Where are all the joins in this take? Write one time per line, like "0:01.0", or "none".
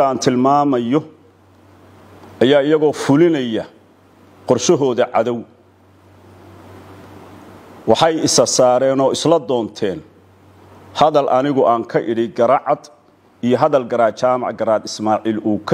none